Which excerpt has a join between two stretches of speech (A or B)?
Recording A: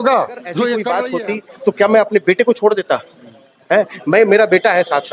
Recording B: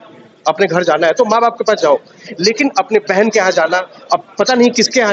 A